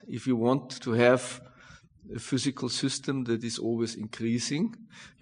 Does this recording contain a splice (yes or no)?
no